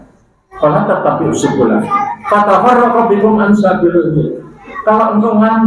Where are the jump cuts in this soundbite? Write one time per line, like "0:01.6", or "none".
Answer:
none

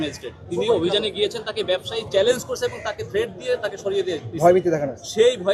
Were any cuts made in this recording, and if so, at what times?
none

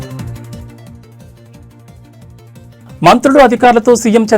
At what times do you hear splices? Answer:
0:02.7

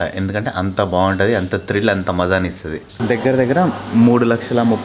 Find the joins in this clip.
0:02.9

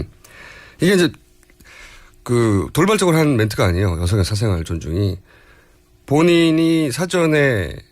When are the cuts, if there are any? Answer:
none

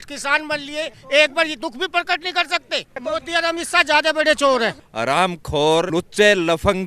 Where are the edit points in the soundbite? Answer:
0:03.0
0:04.9
0:05.9

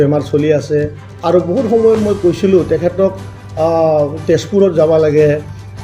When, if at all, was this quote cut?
none

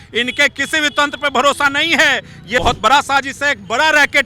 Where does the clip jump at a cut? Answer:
0:02.6

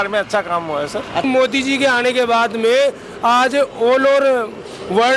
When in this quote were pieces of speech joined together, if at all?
0:01.2

